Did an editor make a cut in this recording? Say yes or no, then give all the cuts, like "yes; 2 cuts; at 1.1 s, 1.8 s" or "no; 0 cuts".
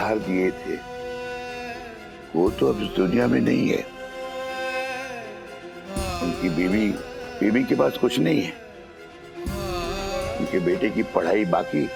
no; 0 cuts